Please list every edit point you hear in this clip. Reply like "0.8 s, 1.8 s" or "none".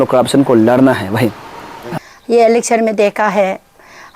1.8 s